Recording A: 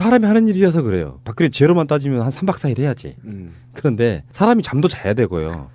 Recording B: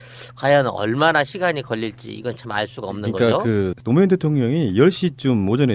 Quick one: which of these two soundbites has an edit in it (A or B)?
A